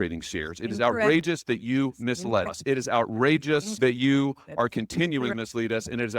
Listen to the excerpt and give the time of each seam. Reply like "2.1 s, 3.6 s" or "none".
2.5 s, 3.7 s, 5.3 s